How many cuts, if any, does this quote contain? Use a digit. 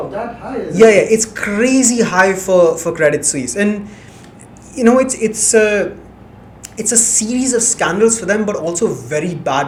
0